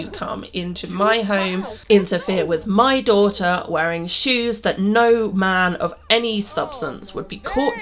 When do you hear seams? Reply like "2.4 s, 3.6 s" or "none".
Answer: none